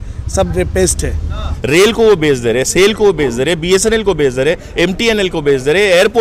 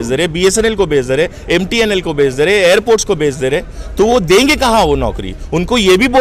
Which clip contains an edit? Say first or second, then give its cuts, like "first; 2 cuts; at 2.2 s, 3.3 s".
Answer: first; 1 cut; at 1.5 s